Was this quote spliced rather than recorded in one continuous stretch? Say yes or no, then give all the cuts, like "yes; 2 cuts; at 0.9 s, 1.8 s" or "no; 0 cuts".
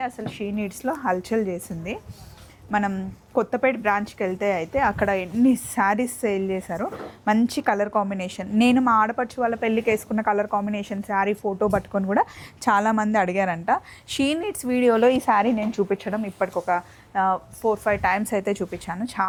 no; 0 cuts